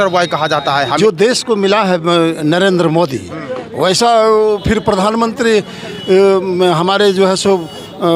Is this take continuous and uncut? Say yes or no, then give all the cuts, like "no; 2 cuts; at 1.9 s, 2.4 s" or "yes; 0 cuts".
no; 1 cut; at 1.0 s